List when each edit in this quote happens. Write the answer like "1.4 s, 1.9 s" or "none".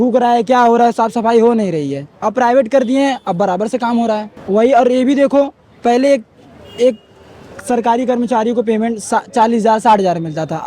4.3 s